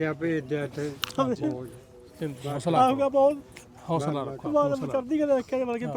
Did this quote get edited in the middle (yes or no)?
no